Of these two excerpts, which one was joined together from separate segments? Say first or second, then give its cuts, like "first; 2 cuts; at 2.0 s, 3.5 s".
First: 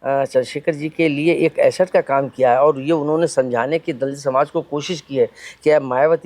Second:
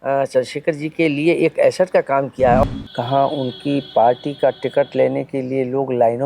second; 1 cut; at 2.6 s